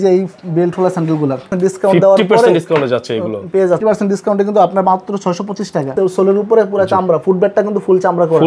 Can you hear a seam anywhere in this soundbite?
yes; 3 cuts; at 1.5 s, 3.8 s, 5.9 s

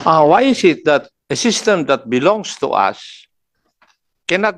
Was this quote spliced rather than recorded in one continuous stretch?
no; 0 cuts

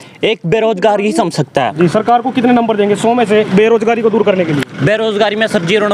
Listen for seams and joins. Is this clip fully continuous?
no; 2 cuts; at 1.7 s, 3.5 s

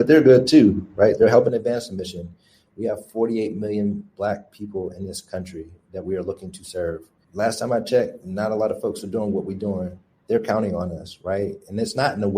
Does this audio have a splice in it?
yes; 1 cut; at 7.1 s

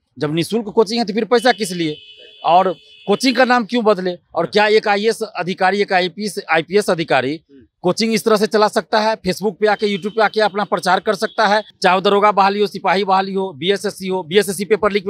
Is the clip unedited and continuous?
no; 1 cut; at 11.7 s

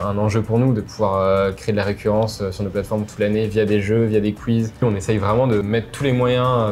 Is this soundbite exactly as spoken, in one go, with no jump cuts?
no; 2 cuts; at 4.8 s, 5.6 s

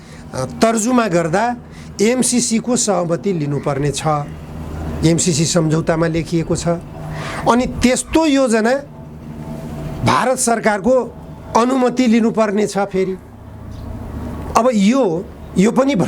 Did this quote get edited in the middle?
no; 0 cuts

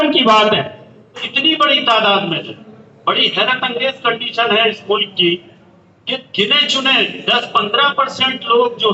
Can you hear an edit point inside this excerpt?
yes; 1 cut; at 1.3 s

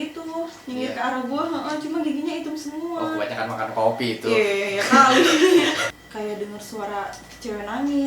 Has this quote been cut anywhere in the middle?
yes; 1 cut; at 5.8 s

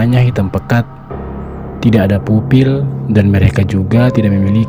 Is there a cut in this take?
no; 0 cuts

